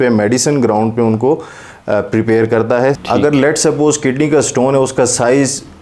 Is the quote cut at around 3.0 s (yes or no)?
yes